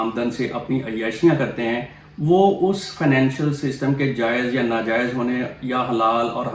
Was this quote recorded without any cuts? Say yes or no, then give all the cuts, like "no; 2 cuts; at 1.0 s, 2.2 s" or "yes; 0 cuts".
yes; 0 cuts